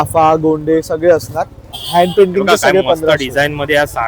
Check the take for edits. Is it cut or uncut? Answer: cut